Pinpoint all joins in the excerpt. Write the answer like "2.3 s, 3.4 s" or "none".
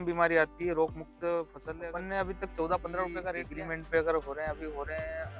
1.6 s, 3.5 s